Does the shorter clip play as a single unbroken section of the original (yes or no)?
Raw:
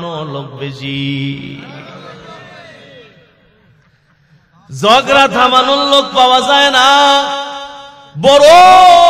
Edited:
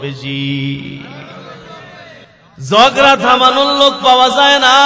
no